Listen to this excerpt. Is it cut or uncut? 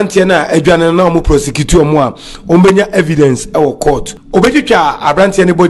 cut